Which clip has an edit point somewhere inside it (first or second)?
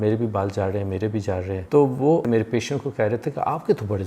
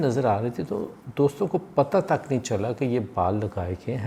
first